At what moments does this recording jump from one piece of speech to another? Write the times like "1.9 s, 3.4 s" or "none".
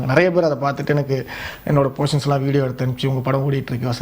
none